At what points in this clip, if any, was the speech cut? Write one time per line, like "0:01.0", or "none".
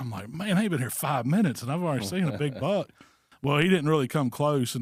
none